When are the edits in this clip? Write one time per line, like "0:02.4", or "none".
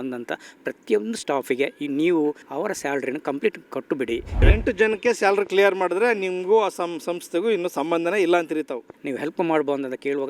0:02.5
0:04.4
0:09.0